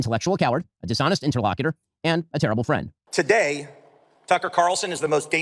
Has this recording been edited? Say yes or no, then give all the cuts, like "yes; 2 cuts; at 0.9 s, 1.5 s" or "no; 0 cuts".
yes; 1 cut; at 3.0 s